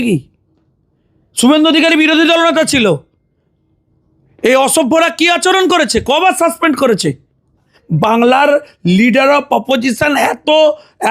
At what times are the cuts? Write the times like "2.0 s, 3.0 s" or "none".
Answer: 7.8 s